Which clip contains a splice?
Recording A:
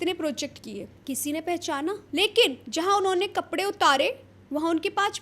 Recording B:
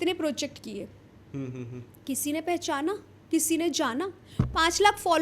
A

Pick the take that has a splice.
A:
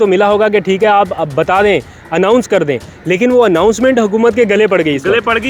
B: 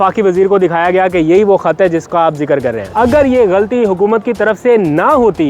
B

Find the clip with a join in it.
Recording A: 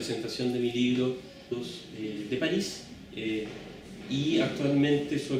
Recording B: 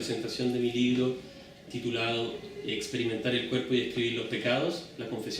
B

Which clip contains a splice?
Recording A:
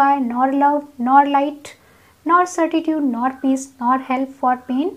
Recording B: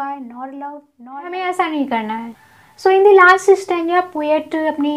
B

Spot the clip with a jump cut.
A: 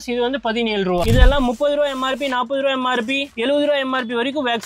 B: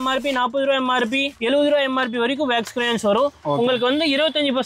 A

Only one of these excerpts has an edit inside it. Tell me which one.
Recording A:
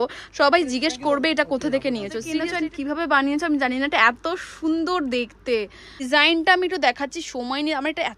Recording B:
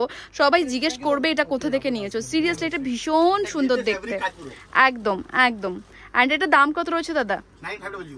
A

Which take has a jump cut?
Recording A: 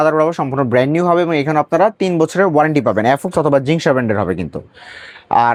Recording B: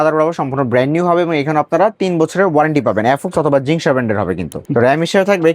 B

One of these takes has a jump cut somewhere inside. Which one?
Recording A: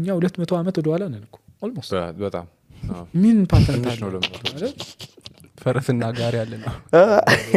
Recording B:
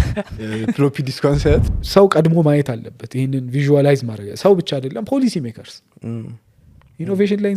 B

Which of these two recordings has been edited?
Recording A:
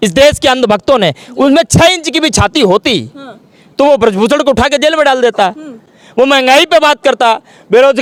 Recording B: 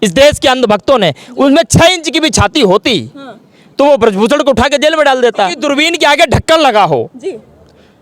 B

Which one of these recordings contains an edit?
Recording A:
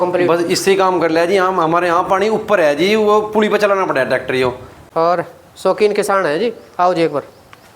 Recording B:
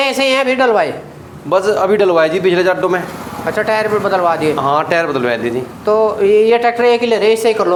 A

